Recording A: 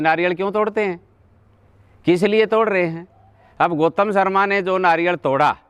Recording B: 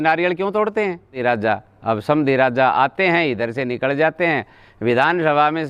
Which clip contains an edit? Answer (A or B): B